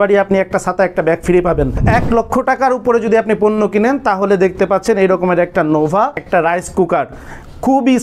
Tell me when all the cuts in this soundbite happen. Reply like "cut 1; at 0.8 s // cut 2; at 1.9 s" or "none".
cut 1; at 1.8 s // cut 2; at 6.2 s